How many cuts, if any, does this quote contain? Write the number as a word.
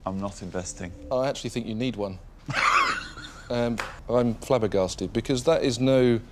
two